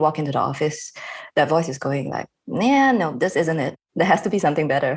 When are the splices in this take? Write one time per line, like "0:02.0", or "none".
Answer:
0:03.8